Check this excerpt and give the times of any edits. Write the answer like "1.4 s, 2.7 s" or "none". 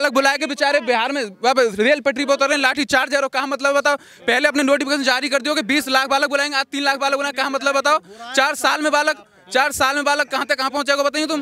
none

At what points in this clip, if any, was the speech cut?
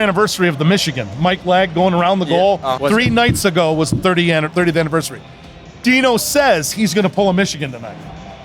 2.7 s

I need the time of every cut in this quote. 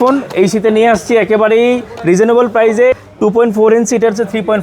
3.0 s

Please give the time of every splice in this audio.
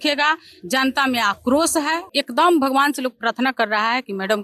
2.1 s

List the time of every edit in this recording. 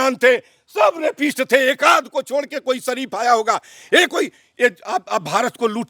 none

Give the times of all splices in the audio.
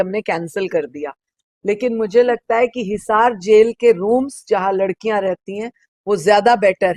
none

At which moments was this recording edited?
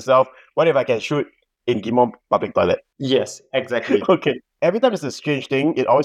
4.5 s

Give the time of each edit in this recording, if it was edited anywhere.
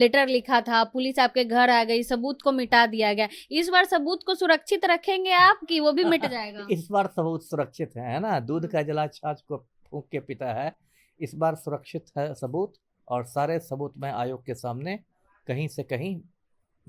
none

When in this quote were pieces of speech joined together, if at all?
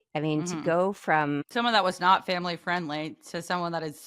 1.5 s

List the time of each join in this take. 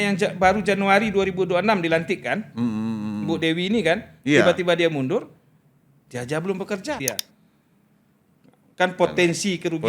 7.0 s

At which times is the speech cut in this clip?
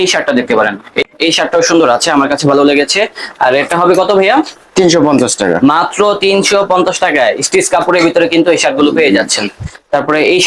1.0 s

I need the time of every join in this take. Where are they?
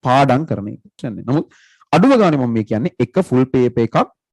1.1 s

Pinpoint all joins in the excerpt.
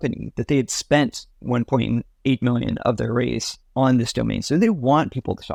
none

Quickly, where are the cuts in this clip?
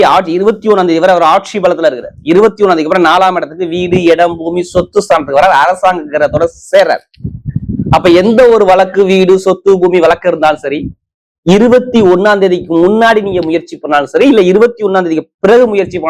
none

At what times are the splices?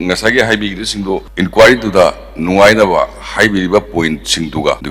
1.3 s

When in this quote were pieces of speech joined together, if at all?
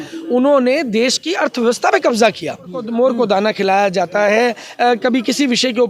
2.8 s

